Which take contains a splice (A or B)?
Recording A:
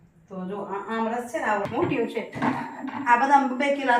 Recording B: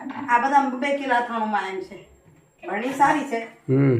A